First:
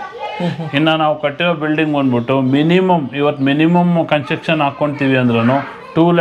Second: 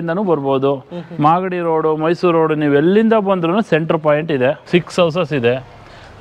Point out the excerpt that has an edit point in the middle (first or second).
second